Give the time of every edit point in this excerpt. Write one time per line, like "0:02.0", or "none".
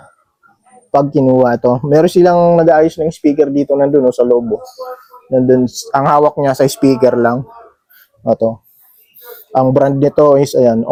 none